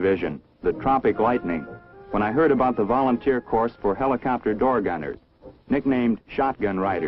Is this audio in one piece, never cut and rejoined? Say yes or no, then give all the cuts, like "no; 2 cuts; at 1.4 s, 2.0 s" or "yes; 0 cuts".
no; 1 cut; at 3.6 s